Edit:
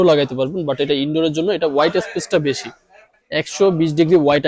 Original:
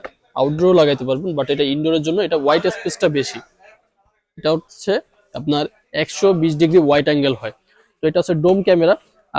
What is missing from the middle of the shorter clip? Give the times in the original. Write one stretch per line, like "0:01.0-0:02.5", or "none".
0:03.9-0:05.8